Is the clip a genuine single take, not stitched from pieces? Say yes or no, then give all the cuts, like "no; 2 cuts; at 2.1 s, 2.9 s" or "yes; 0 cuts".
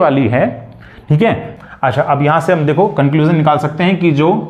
no; 1 cut; at 1.5 s